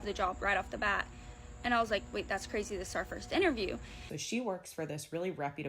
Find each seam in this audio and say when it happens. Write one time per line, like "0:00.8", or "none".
0:04.1